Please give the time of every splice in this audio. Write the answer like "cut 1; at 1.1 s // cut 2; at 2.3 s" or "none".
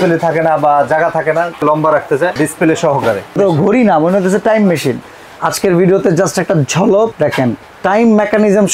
cut 1; at 1.6 s // cut 2; at 2.4 s // cut 3; at 3.4 s // cut 4; at 5.1 s // cut 5; at 7.1 s